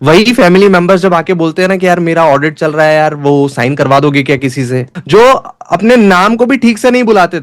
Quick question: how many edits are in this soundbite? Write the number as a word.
one